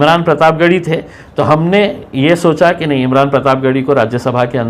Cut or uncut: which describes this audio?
uncut